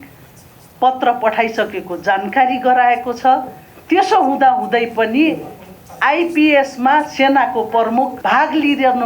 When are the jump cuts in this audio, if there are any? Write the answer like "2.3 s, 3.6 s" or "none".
8.2 s